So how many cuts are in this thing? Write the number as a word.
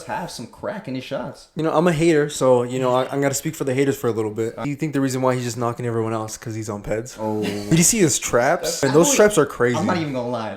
four